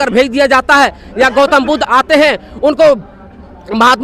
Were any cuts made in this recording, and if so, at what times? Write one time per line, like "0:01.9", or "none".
0:01.9